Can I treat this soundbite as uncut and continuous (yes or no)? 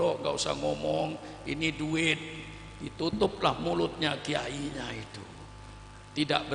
yes